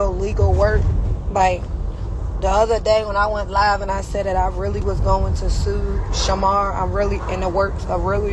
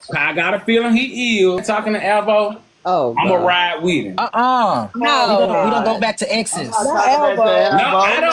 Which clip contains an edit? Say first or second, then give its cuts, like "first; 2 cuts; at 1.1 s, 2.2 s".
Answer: second; 2 cuts; at 1.6 s, 4.5 s